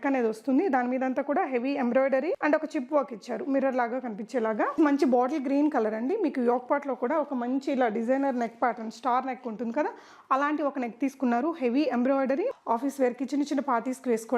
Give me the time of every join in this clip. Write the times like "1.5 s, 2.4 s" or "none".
4.8 s, 12.5 s